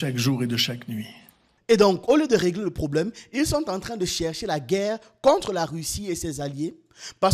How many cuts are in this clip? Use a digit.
1